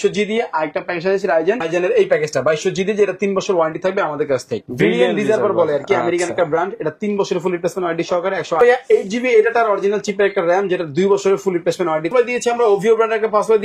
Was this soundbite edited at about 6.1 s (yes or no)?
no